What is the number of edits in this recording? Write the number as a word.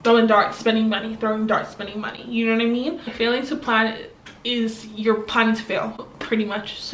zero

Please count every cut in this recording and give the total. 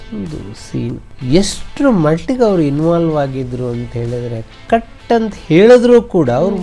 one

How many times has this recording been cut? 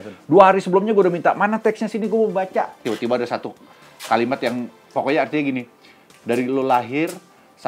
one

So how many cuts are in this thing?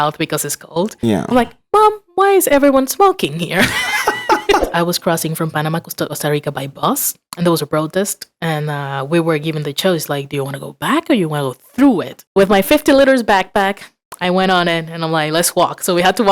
four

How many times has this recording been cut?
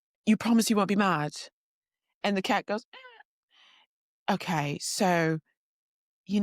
zero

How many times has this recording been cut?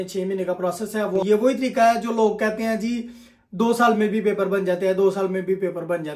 one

